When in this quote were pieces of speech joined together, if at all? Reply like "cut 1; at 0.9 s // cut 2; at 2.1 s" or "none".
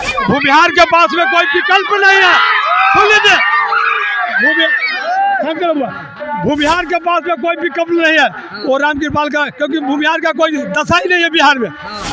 none